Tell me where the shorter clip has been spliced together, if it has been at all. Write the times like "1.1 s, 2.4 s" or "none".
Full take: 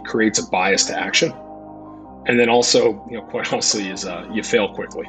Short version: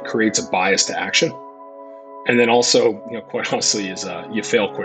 none